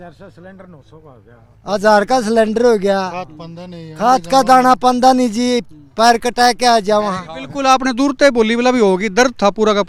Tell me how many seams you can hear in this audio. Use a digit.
0